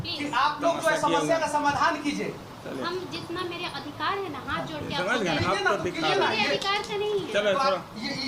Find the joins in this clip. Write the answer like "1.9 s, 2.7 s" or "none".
none